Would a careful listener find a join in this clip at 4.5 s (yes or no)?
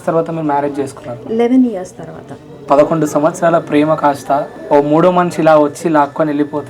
yes